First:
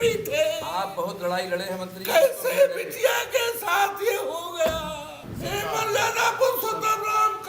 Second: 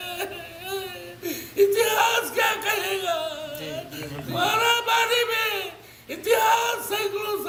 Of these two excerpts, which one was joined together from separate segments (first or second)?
first